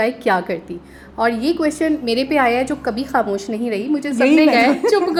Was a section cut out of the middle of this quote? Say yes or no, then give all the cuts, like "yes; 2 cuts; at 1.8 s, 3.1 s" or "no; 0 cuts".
no; 0 cuts